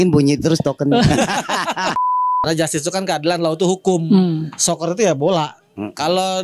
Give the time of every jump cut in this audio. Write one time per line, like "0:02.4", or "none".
0:02.0